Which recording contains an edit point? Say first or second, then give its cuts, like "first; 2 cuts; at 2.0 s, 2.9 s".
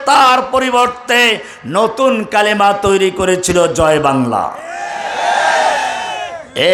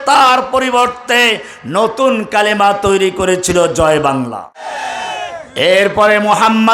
second; 1 cut; at 4.8 s